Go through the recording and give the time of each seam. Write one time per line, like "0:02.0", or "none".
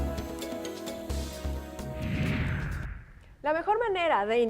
0:02.0